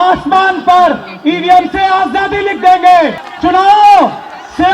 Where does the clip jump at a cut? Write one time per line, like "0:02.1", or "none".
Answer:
0:03.2

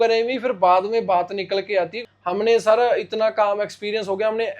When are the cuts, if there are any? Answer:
0:02.0

